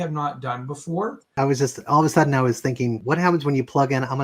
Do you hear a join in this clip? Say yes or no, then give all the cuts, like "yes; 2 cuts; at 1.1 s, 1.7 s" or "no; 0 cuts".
yes; 2 cuts; at 1.3 s, 3.0 s